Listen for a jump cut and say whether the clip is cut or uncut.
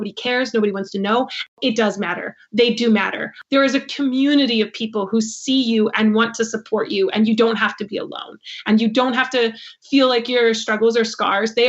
cut